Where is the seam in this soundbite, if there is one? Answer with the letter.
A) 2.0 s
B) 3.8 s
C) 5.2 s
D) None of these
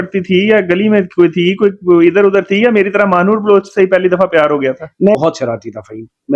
C